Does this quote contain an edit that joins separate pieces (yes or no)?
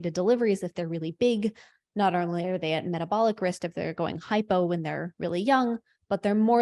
no